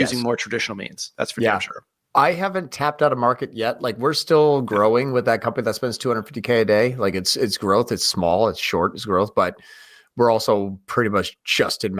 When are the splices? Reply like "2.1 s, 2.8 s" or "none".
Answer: none